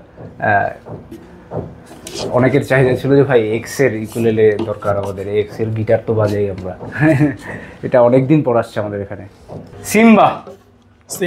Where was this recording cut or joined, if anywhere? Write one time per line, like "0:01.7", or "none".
0:09.7